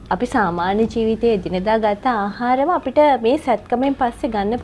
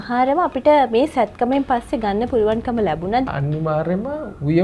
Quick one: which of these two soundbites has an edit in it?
second; 1 cut; at 3.3 s

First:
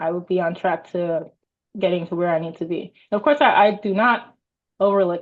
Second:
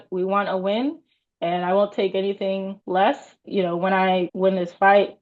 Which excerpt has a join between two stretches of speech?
second; 3 cuts; at 2.8 s, 3.4 s, 4.3 s

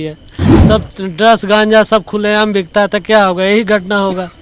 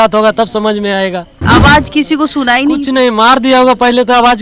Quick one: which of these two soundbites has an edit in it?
second; 1 cut; at 1.3 s

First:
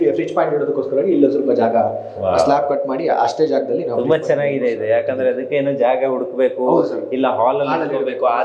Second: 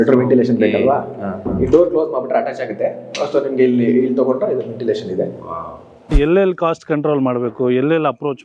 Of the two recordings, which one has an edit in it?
second; 1 cut; at 6.1 s

